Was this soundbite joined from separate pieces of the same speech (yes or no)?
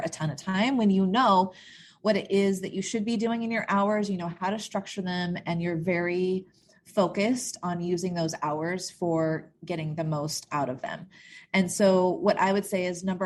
no